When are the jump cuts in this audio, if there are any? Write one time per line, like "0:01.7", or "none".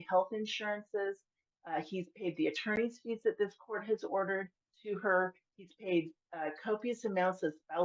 0:04.7